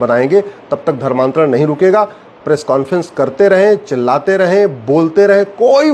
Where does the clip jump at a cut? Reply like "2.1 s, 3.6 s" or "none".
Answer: none